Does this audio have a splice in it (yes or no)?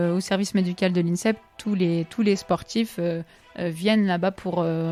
no